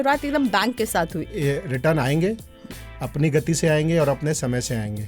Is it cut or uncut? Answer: cut